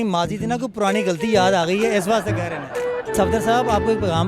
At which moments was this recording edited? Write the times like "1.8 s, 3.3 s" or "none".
3.1 s